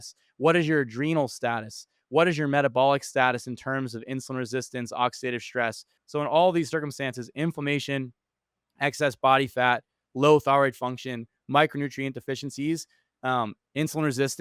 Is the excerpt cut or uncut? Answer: cut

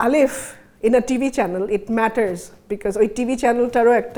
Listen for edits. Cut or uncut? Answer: uncut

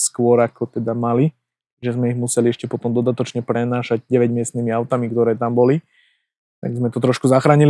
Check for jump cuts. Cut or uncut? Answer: uncut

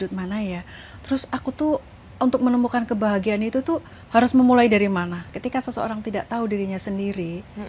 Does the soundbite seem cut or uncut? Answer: cut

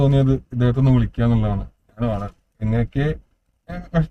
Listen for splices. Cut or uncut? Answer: uncut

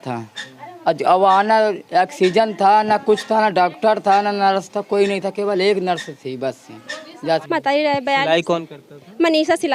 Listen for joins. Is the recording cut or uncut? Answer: cut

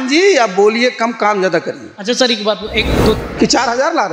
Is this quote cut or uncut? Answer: cut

